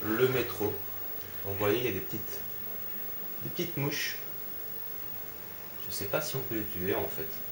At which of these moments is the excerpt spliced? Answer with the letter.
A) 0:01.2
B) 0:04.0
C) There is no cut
C